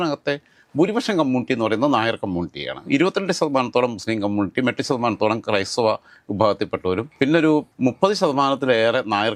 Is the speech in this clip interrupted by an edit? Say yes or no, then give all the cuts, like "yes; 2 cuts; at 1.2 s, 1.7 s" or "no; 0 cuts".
no; 0 cuts